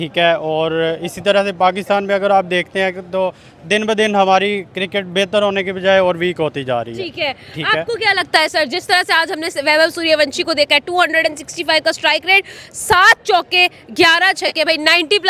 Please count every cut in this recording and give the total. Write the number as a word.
zero